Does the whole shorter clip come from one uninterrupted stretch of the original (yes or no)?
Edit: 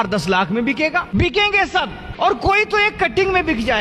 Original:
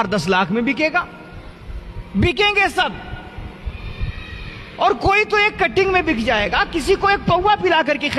no